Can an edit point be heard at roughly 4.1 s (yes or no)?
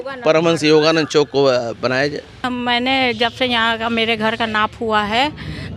no